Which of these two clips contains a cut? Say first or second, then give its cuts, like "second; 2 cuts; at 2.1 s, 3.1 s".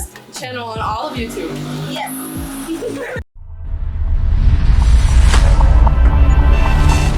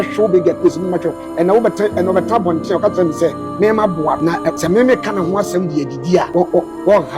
second; 2 cuts; at 4.4 s, 6.3 s